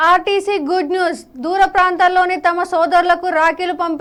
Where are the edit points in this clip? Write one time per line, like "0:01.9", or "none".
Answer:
none